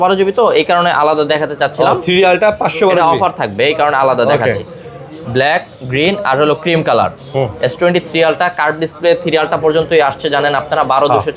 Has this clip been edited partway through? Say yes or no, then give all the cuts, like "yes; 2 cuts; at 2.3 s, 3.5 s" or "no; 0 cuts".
no; 0 cuts